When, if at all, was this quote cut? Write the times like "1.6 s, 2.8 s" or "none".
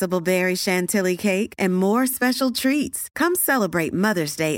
none